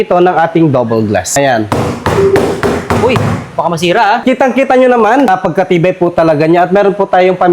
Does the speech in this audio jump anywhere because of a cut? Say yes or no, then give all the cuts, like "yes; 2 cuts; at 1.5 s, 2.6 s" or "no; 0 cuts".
yes; 3 cuts; at 1.3 s, 4.2 s, 5.3 s